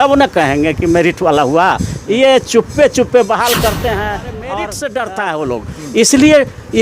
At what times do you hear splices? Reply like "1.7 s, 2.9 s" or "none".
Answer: 4.5 s